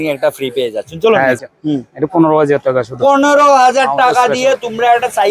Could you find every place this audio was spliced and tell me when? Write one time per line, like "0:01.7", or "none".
0:01.4